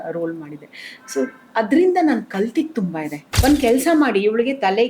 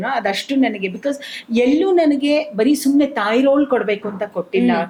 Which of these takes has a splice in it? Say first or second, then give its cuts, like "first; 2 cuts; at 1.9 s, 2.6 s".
first; 1 cut; at 3.2 s